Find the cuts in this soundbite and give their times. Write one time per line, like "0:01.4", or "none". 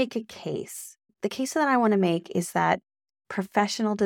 0:01.1